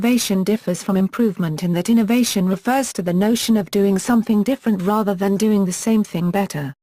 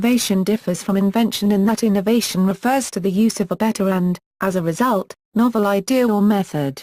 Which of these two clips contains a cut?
second; 1 cut; at 0.9 s

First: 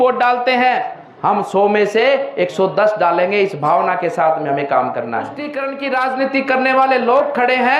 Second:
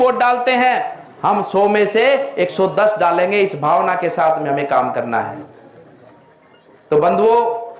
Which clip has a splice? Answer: first; 1 cut; at 5.5 s

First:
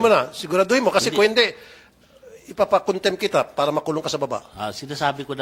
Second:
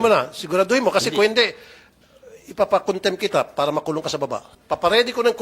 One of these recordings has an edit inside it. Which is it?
second; 1 cut; at 4.5 s

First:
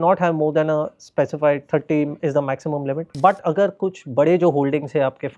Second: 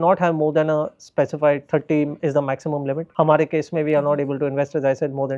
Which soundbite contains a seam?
first; 1 cut; at 3.1 s

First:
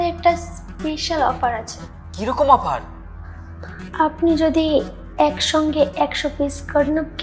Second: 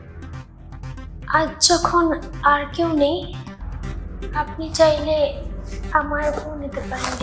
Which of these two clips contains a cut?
first; 1 cut; at 1.8 s

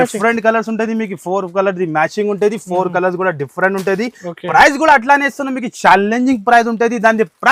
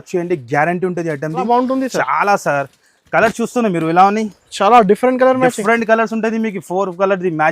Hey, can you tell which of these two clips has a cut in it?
second; 1 cut; at 1.5 s

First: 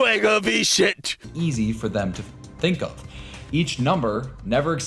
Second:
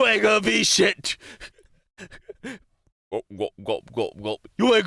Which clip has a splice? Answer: first; 1 cut; at 1.3 s

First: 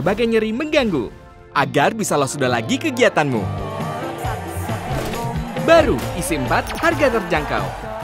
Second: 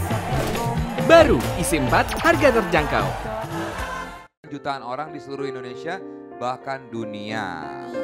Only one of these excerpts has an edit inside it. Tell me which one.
second; 1 cut; at 4.5 s

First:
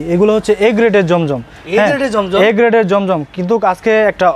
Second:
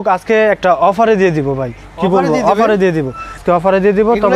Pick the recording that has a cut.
second; 1 cut; at 3.4 s

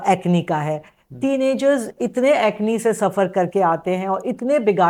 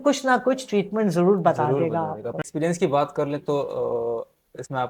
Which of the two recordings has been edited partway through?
second; 1 cut; at 2.4 s

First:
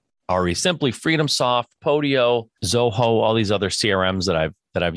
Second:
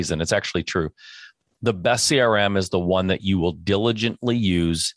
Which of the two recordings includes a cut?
first; 1 cut; at 2.6 s

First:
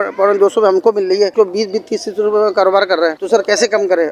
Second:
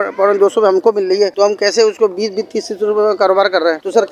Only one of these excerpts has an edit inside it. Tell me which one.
first; 1 cut; at 1.3 s

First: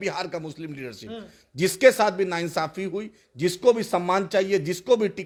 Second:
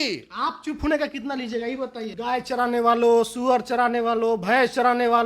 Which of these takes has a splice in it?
second; 1 cut; at 2.0 s

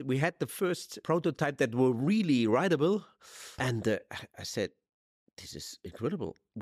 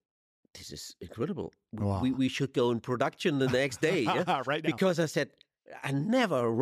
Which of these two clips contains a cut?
first; 2 cuts; at 0.9 s, 3.6 s

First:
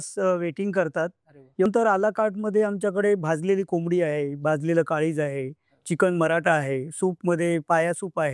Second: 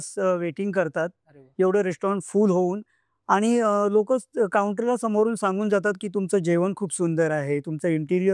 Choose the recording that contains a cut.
first; 1 cut; at 1.7 s

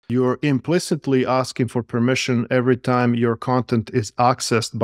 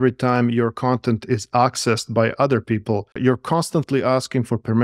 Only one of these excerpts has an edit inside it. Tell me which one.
second; 1 cut; at 3.1 s

